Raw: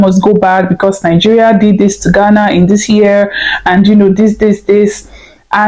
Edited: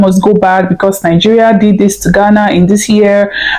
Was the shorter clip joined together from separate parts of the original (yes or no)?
no